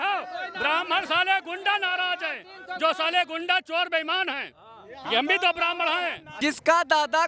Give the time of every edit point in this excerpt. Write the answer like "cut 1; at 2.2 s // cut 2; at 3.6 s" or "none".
cut 1; at 6.2 s